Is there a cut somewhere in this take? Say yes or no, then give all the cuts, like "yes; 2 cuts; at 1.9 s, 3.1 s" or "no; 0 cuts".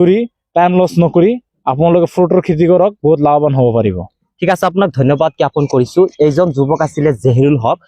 no; 0 cuts